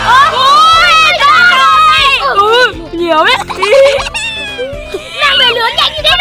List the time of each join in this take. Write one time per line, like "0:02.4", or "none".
none